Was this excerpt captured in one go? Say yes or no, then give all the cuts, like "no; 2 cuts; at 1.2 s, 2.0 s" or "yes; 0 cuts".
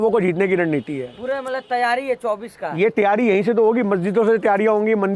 yes; 0 cuts